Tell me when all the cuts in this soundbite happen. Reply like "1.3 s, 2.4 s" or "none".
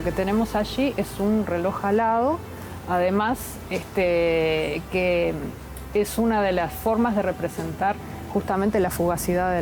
none

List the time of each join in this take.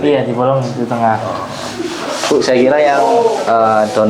none

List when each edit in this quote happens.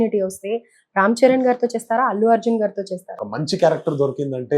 3.2 s

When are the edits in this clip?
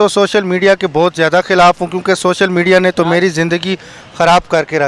none

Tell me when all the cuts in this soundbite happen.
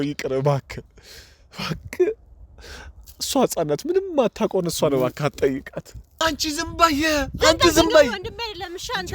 6.2 s

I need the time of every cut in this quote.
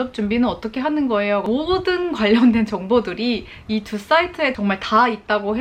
1.4 s

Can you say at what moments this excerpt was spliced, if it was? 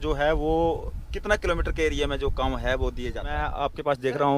3.5 s

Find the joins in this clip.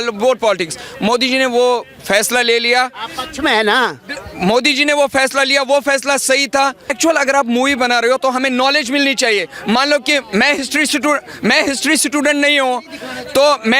6.9 s

